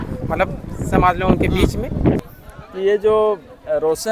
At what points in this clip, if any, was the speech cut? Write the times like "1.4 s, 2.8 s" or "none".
2.2 s